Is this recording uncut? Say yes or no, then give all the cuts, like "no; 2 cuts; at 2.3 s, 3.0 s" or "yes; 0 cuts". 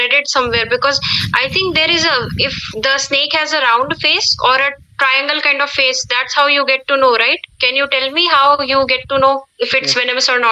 yes; 0 cuts